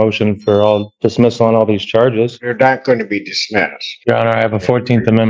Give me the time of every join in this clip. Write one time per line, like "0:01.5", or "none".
0:00.9
0:02.4
0:03.8